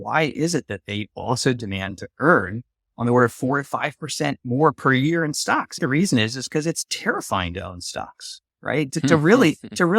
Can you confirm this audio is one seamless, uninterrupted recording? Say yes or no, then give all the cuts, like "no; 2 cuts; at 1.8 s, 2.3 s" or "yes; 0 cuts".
no; 1 cut; at 5.8 s